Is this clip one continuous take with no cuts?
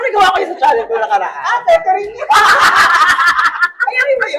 yes; 0 cuts

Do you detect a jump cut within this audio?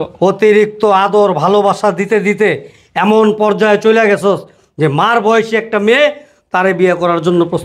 no; 0 cuts

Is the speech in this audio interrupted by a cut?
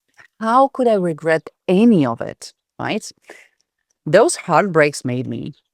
no; 0 cuts

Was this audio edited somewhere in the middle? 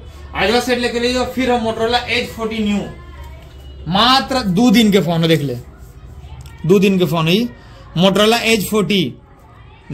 no; 0 cuts

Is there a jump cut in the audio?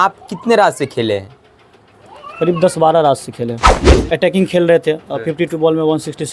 yes; 1 cut; at 4.0 s

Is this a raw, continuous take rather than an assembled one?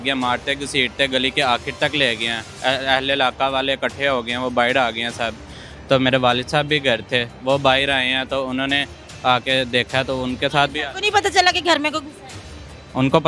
yes; 0 cuts

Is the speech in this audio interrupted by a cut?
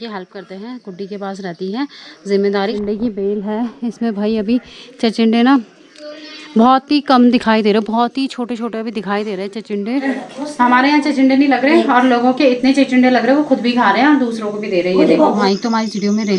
yes; 3 cuts; at 2.7 s, 10.1 s, 15.4 s

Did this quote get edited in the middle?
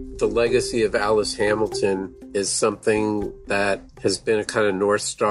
yes; 2 cuts; at 2.2 s, 3.9 s

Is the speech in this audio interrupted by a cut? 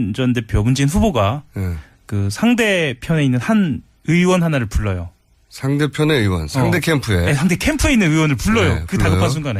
yes; 1 cut; at 8.2 s

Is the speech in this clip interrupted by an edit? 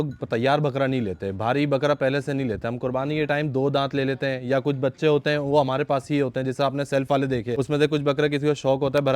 yes; 1 cut; at 7.6 s

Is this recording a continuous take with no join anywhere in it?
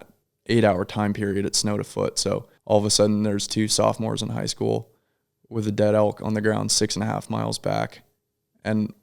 no; 1 cut; at 2.5 s

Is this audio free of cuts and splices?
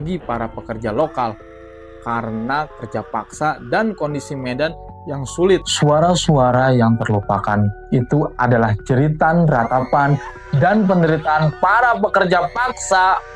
no; 1 cut; at 5.7 s

